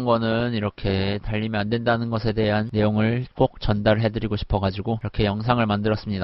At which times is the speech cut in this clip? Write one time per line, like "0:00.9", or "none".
none